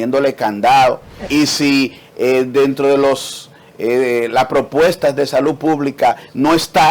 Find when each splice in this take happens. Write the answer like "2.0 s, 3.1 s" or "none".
1.1 s